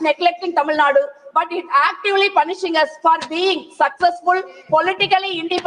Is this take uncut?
yes; 0 cuts

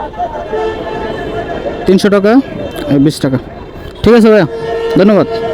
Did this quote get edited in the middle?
no; 0 cuts

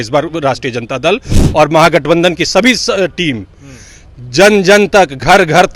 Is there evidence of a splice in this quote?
no; 0 cuts

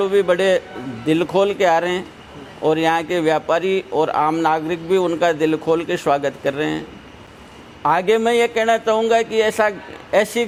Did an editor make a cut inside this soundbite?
no; 0 cuts

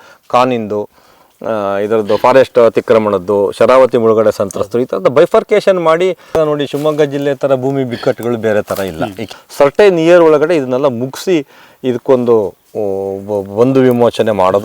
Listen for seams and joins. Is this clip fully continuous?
no; 2 cuts; at 6.2 s, 9.2 s

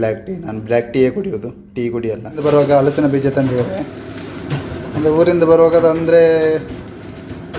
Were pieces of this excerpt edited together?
yes; 1 cut; at 2.4 s

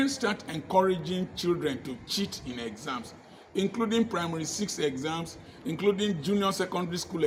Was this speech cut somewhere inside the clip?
no; 0 cuts

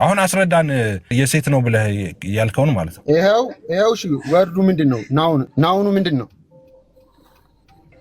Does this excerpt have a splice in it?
yes; 2 cuts; at 1.1 s, 5.5 s

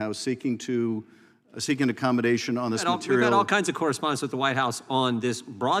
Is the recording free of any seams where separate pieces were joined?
yes; 0 cuts

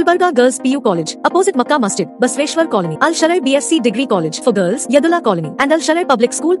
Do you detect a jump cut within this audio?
no; 0 cuts

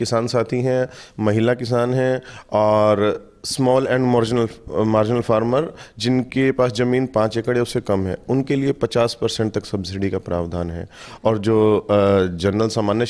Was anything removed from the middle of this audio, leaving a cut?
no; 0 cuts

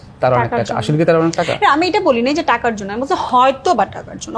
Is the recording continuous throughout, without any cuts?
yes; 0 cuts

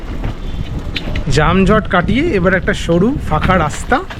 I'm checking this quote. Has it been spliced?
no; 0 cuts

